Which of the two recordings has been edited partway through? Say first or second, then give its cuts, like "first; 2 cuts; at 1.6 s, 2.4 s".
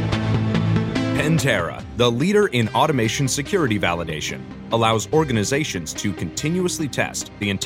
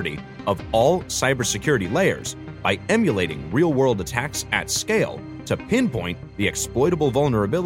first; 1 cut; at 1.2 s